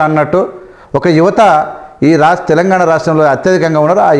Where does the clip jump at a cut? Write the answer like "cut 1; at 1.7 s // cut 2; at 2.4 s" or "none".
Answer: none